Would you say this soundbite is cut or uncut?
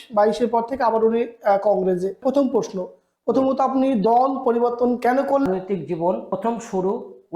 cut